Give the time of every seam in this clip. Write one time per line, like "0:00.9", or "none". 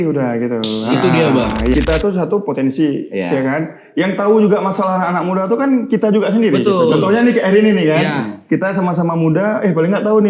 0:01.7